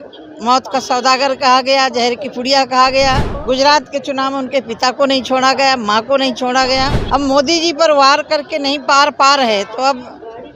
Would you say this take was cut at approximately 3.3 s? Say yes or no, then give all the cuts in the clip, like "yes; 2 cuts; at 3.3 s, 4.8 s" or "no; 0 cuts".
yes; 2 cuts; at 3.3 s, 7.0 s